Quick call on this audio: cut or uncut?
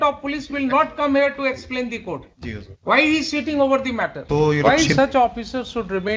cut